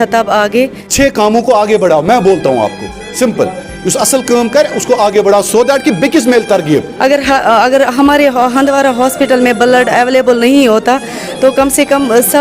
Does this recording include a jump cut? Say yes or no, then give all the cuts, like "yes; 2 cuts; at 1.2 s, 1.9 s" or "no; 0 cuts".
yes; 2 cuts; at 0.8 s, 6.9 s